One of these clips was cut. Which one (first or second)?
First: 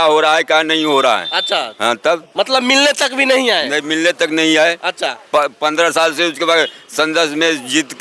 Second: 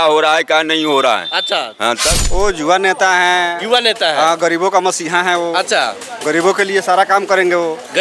second